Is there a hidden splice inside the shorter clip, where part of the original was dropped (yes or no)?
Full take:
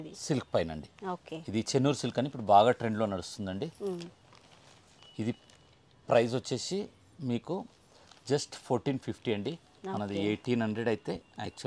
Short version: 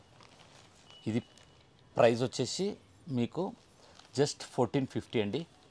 no